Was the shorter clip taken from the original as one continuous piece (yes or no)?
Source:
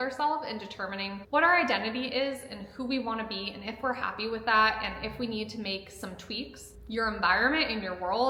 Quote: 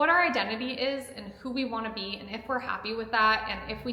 yes